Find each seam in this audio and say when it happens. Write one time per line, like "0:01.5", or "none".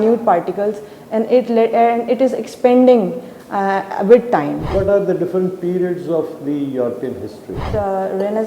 0:04.7
0:07.6